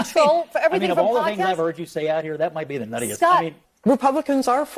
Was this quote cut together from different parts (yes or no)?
yes